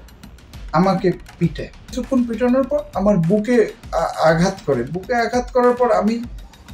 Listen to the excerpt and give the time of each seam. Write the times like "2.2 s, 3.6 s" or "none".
2.0 s